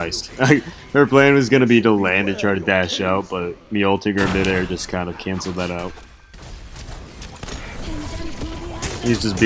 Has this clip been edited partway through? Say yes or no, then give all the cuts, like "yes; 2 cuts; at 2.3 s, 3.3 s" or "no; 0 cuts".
yes; 1 cut; at 6.4 s